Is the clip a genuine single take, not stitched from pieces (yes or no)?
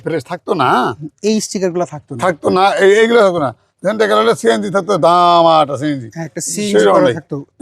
yes